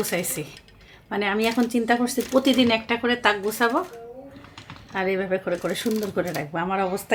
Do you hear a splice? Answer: no; 0 cuts

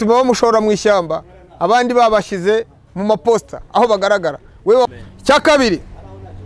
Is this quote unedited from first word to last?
no; 1 cut; at 4.9 s

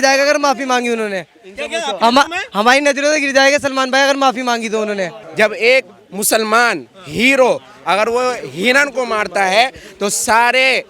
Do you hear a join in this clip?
yes; 1 cut; at 5.2 s

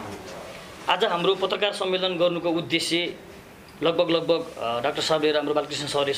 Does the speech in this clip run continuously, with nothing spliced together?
yes; 0 cuts

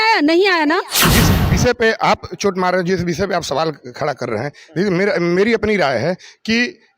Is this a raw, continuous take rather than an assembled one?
no; 1 cut; at 1.1 s

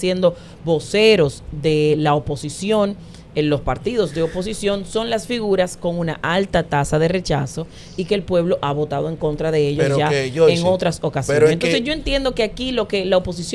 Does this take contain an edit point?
no; 0 cuts

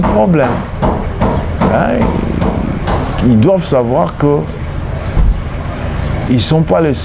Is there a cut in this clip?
no; 0 cuts

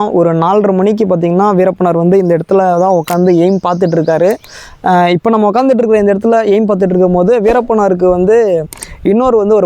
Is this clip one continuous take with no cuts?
yes; 0 cuts

